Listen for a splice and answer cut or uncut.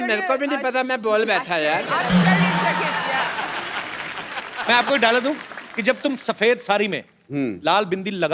cut